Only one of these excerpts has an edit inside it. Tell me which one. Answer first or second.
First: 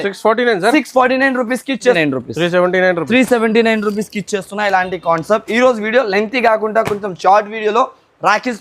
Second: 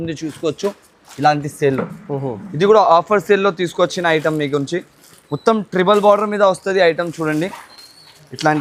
first